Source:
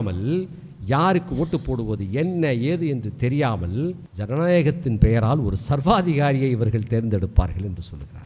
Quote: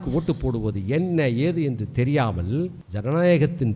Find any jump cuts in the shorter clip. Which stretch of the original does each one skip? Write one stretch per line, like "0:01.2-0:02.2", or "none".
none

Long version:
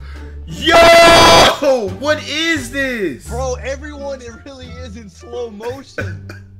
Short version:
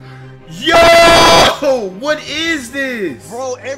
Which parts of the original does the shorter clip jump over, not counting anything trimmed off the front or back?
none

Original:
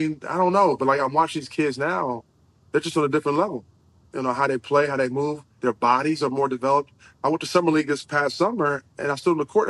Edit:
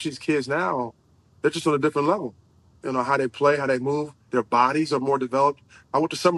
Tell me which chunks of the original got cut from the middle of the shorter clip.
none

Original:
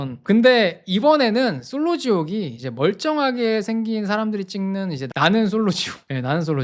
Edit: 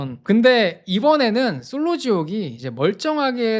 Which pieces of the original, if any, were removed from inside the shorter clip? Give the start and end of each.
none

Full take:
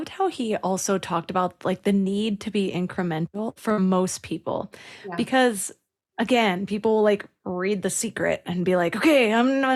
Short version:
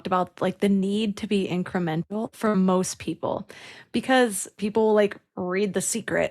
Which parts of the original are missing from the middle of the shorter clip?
0:05.8-0:06.6

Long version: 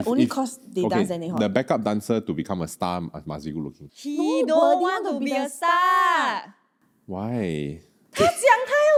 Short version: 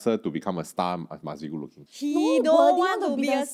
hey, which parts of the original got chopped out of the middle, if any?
none

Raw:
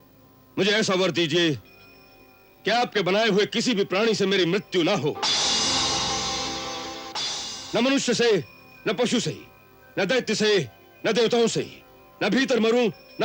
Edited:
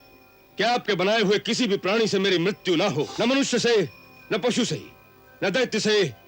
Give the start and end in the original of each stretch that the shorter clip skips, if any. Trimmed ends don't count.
0:05.2-0:07.7

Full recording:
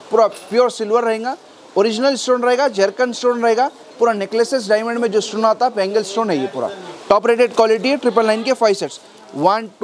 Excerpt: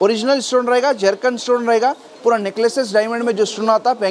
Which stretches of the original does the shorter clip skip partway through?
none

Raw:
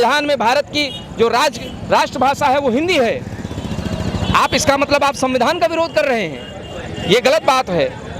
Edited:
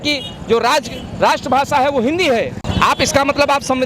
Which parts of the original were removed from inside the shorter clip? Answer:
0:03.3-0:04.1

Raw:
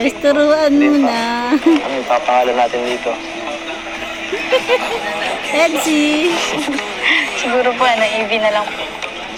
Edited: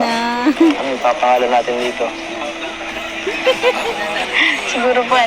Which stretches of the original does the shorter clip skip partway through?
0:05.3-0:07.0

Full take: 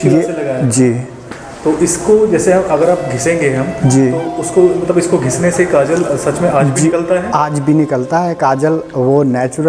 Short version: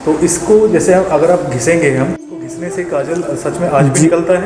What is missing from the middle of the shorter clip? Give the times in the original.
0:03.8-0:05.0

